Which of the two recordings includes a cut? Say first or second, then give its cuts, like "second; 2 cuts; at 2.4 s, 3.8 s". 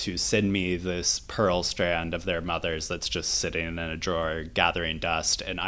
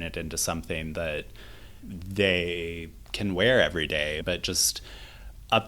second; 1 cut; at 4.2 s